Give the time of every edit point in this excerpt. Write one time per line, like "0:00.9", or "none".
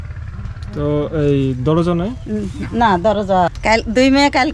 0:03.6